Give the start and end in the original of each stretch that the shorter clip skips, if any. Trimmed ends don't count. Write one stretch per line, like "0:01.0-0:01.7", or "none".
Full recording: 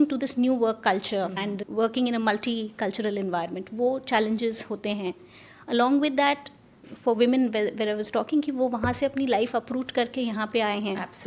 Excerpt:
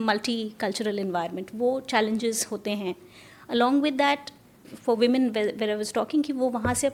none